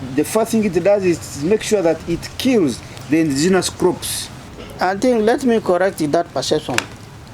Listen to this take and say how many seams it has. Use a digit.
1